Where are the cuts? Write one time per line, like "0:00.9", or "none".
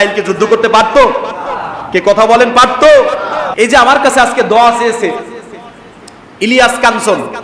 0:03.4